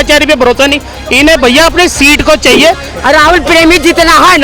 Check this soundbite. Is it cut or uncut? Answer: cut